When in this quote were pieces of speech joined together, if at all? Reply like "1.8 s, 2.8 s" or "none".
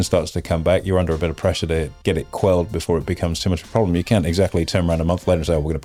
none